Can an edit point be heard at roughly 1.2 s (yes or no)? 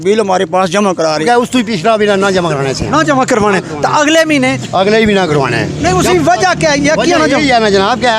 yes